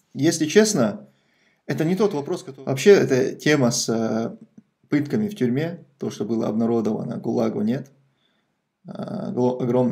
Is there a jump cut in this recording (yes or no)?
yes